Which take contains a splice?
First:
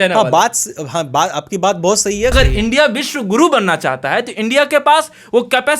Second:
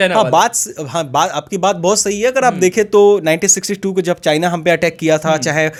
first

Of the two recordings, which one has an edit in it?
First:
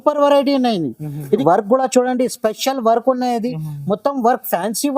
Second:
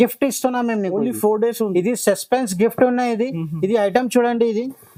first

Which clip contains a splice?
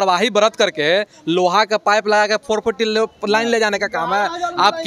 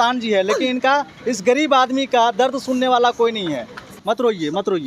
second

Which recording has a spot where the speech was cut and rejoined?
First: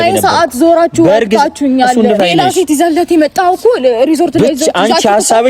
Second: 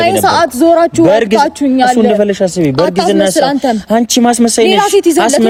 first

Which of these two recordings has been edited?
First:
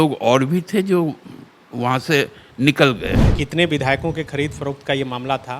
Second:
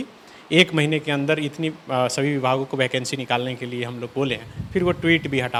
first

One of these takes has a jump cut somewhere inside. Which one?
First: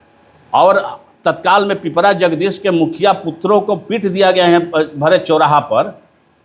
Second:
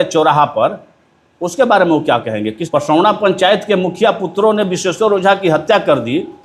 second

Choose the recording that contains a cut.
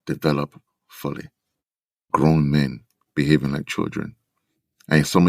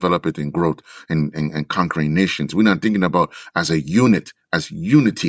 first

